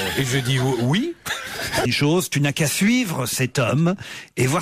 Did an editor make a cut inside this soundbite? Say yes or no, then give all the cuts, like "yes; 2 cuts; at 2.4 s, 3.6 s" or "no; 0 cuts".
no; 0 cuts